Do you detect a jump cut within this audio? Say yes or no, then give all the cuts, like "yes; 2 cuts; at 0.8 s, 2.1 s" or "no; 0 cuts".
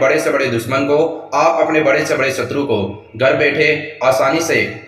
no; 0 cuts